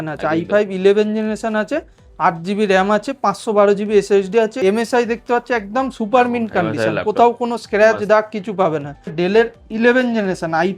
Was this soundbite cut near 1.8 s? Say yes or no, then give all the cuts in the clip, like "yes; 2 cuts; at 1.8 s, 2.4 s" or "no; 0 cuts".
no; 2 cuts; at 4.5 s, 9.1 s